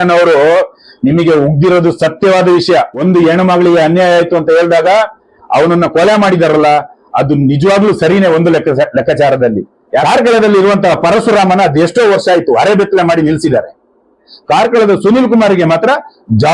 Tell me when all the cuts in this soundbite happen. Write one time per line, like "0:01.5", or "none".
0:02.9
0:10.0
0:14.3